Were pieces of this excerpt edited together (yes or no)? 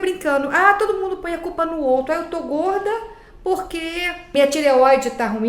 yes